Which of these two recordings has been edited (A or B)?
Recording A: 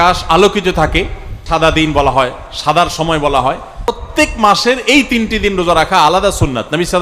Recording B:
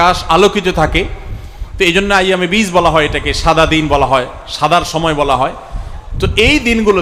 A